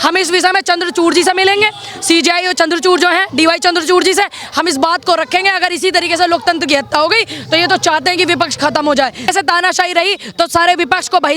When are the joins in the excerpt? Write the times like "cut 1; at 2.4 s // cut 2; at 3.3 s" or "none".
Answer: cut 1; at 9.2 s

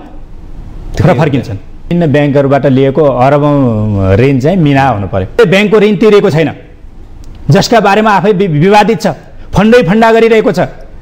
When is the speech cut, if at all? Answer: cut 1; at 1.9 s // cut 2; at 5.4 s

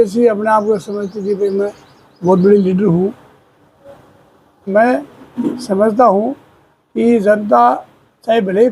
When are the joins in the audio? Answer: cut 1; at 4.7 s

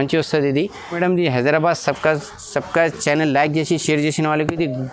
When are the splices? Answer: none

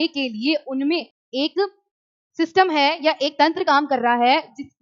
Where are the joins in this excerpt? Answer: cut 1; at 1.2 s

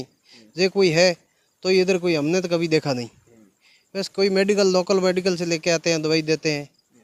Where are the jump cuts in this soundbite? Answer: none

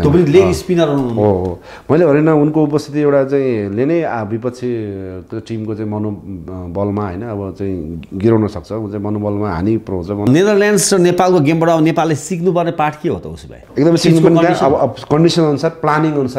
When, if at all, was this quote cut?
cut 1; at 10.3 s

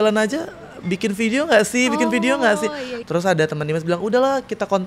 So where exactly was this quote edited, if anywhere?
cut 1; at 2.9 s

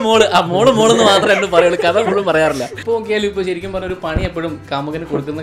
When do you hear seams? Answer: cut 1; at 2.7 s

